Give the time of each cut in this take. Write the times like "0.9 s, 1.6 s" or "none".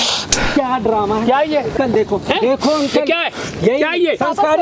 1.7 s